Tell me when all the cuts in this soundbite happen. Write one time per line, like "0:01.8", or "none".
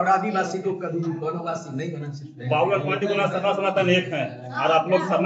none